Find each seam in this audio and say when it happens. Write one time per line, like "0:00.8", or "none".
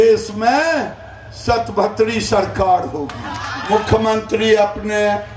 0:03.6